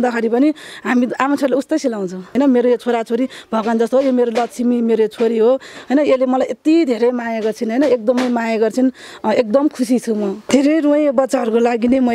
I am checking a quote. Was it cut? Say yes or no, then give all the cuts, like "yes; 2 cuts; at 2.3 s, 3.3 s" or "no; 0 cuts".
yes; 2 cuts; at 2.3 s, 10.4 s